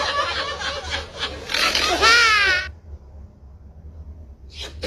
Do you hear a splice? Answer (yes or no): no